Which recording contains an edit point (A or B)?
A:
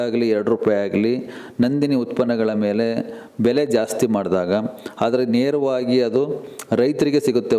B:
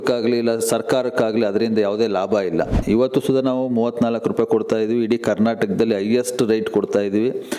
B